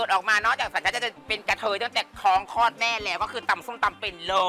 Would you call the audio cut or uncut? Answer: uncut